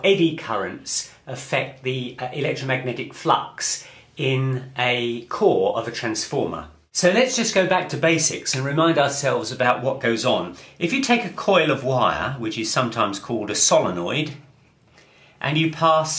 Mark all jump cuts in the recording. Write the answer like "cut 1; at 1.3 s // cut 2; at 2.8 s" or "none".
cut 1; at 10.5 s